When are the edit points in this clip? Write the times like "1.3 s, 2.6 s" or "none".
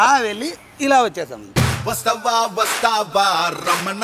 1.4 s